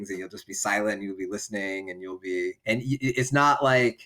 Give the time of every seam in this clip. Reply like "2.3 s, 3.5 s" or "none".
2.6 s